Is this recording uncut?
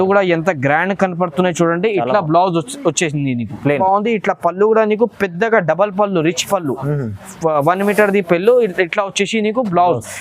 no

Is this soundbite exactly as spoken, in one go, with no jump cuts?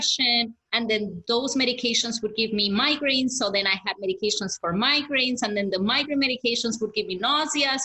yes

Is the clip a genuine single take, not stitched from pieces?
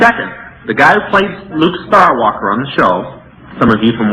no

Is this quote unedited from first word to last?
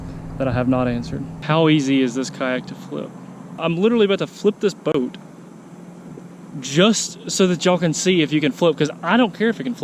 no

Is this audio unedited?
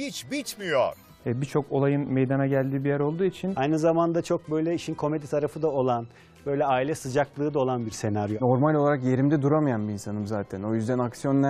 yes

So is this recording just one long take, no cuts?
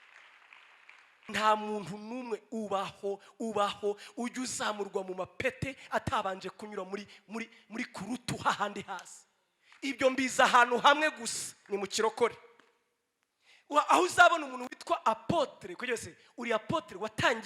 no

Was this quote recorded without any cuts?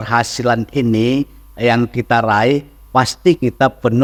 yes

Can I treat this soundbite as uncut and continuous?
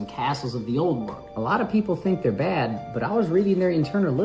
yes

